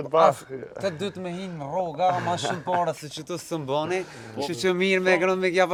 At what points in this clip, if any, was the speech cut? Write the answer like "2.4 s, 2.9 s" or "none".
none